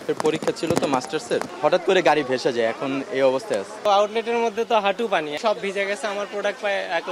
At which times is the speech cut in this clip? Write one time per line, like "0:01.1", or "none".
0:01.5
0:03.8
0:05.4